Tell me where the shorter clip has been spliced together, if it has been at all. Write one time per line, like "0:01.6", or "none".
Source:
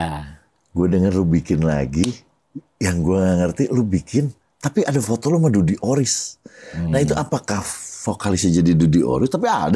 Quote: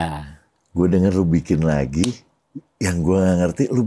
none